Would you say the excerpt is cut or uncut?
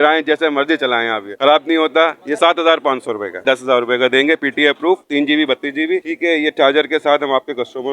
cut